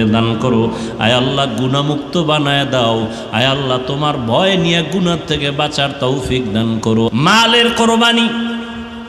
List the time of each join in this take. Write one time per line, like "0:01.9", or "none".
0:07.1